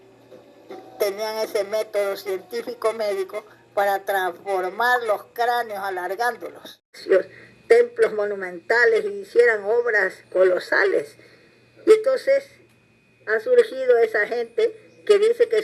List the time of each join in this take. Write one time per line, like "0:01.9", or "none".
0:03.8
0:06.8